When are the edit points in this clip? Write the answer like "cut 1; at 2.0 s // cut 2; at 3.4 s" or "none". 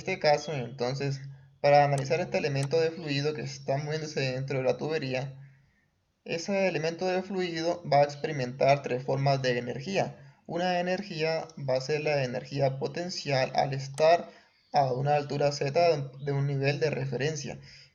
none